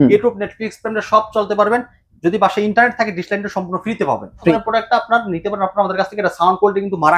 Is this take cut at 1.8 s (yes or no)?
no